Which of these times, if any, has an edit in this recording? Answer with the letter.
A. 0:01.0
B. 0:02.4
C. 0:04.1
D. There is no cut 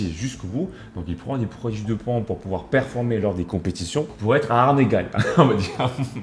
C